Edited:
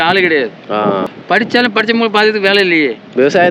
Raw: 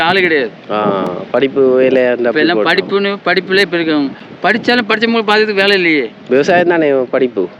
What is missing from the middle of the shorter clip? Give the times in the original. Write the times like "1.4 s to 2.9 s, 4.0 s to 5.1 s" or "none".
1.1 s to 4.3 s